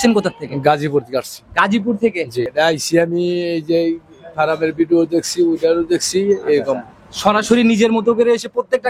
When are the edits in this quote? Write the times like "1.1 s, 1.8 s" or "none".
2.5 s